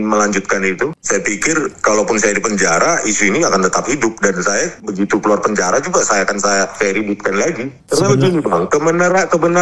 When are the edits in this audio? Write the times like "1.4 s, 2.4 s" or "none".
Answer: 1.0 s, 4.8 s, 6.7 s, 7.8 s